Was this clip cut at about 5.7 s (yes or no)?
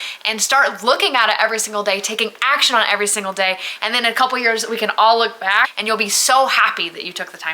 yes